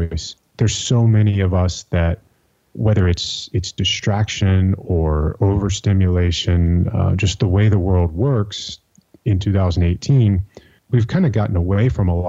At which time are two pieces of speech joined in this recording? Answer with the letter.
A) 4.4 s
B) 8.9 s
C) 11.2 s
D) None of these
D